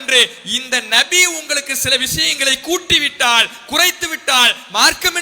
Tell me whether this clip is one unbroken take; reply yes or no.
yes